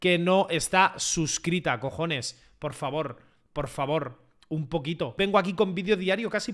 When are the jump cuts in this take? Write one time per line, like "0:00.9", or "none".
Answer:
0:05.1